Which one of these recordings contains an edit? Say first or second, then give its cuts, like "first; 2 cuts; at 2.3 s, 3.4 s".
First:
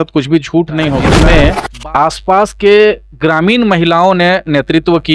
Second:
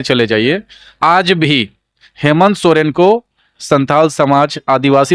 first; 1 cut; at 1.1 s